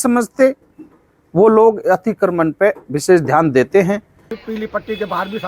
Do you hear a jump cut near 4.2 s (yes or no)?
yes